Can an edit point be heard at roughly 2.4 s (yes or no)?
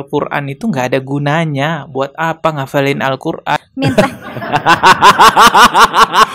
no